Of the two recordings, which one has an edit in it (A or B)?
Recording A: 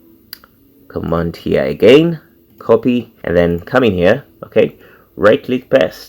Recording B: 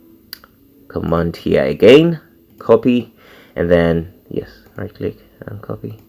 A